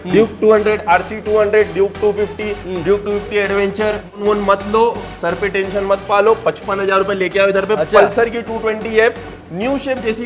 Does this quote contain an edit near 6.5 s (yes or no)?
no